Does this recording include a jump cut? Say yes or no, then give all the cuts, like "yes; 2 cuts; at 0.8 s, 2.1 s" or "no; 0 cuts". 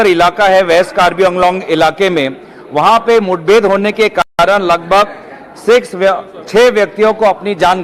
no; 0 cuts